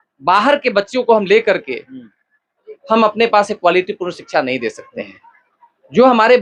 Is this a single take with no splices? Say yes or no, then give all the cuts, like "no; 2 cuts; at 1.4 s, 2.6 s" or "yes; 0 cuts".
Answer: yes; 0 cuts